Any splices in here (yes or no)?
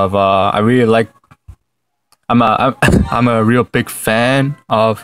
no